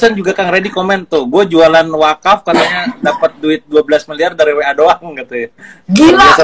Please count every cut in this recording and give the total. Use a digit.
0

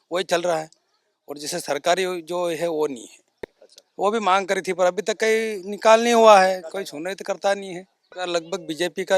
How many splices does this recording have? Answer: 1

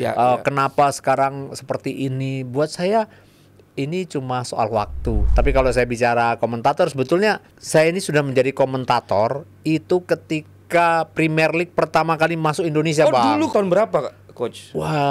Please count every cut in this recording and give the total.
3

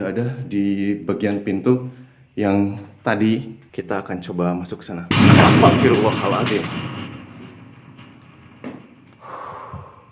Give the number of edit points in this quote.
1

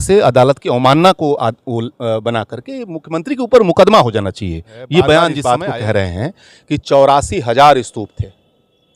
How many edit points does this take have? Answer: 1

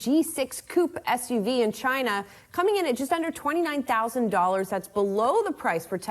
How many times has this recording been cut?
0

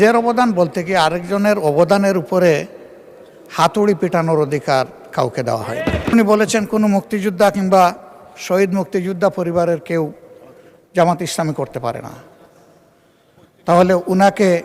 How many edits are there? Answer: 1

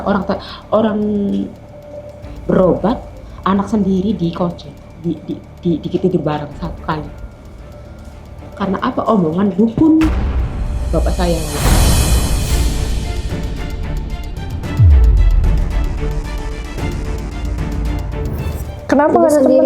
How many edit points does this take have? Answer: 1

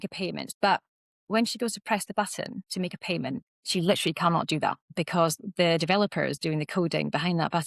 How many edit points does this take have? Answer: 1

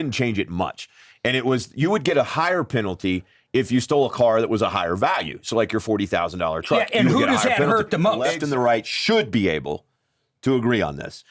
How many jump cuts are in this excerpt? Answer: 1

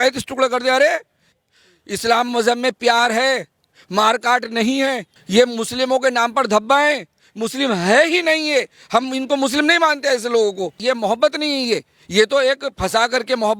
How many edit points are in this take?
3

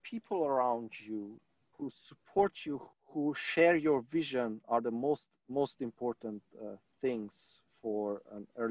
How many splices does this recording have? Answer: 2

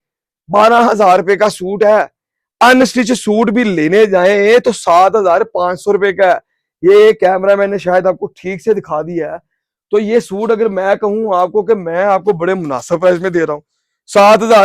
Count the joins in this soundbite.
0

